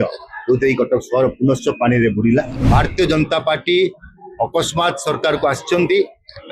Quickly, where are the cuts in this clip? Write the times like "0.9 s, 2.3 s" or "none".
2.6 s